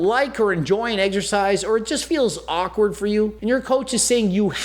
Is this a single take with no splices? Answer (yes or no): no